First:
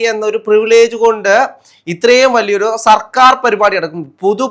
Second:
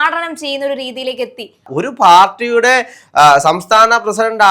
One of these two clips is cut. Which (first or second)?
second